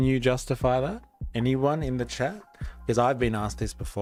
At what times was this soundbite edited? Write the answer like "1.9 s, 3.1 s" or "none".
none